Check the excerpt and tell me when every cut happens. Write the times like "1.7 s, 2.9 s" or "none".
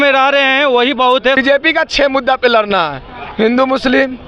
1.4 s

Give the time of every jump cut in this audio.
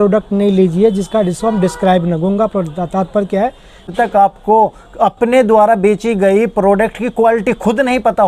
3.9 s

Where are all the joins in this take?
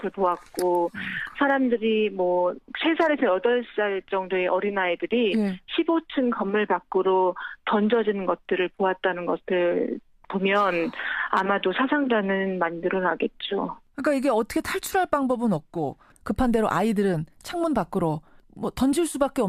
none

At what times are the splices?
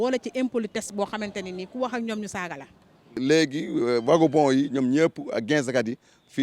3.1 s

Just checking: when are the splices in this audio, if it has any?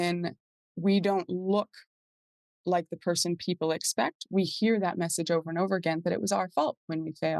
none

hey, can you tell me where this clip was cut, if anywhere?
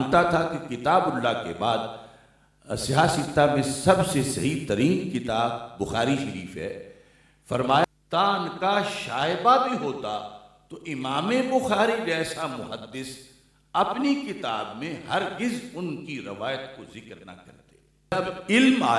7.8 s, 18.1 s

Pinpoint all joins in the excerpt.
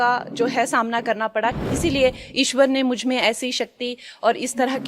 1.6 s

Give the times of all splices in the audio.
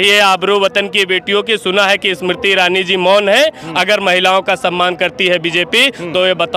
none

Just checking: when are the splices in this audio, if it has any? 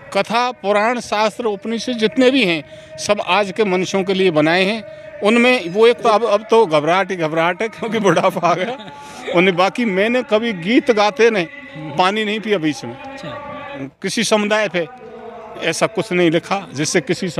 6.0 s, 13.8 s

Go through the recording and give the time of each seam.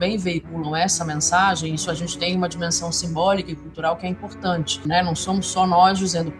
4.8 s

